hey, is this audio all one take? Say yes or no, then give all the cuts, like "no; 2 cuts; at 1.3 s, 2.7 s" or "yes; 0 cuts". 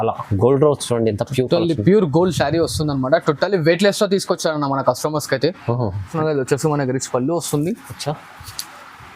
no; 1 cut; at 6.1 s